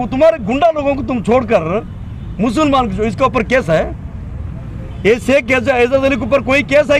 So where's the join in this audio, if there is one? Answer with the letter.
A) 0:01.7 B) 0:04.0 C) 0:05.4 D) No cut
D